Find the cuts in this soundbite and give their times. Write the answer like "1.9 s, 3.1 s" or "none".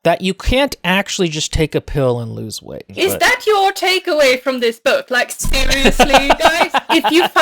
2.9 s

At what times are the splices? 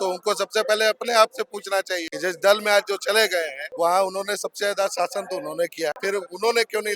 2.1 s, 3.6 s, 6.0 s

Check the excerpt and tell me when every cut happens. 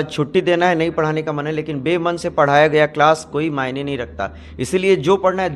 none

